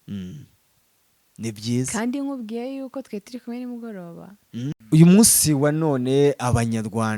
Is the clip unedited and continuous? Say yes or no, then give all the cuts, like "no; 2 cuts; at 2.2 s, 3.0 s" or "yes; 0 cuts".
no; 1 cut; at 4.8 s